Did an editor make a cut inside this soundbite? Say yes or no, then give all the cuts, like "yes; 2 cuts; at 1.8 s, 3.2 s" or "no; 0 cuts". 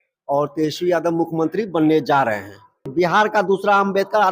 yes; 1 cut; at 2.9 s